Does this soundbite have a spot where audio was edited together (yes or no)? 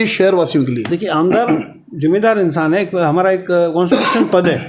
no